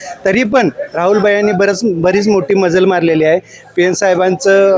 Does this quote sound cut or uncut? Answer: uncut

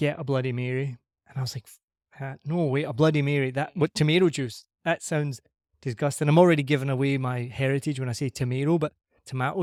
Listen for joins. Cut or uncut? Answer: uncut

